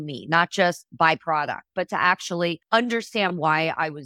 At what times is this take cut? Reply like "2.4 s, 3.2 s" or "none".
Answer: 2.6 s